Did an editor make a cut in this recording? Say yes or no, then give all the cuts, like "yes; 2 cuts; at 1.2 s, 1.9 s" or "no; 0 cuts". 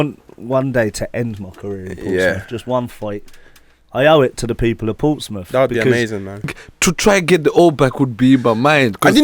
yes; 1 cut; at 6.6 s